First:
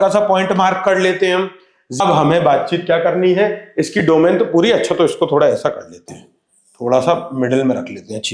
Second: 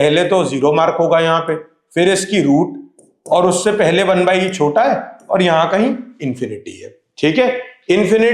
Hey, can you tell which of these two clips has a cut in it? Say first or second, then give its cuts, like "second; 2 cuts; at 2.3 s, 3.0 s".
first; 1 cut; at 2.0 s